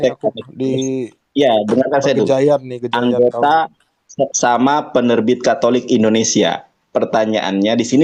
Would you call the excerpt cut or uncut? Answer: uncut